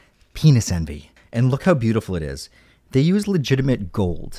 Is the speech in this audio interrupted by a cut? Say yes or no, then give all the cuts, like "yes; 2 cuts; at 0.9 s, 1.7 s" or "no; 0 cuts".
yes; 1 cut; at 1.0 s